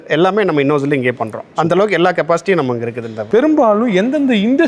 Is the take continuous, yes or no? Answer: no